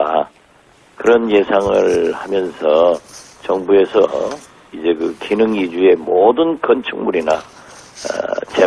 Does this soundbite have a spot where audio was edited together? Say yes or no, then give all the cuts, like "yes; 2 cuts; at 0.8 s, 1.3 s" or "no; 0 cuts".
no; 0 cuts